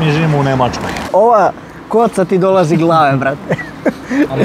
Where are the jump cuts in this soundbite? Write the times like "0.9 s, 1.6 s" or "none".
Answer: 1.1 s